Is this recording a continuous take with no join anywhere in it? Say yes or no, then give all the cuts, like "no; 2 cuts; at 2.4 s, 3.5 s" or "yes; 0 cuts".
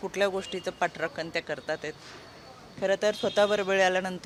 yes; 0 cuts